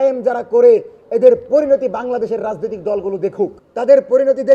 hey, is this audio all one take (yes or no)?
no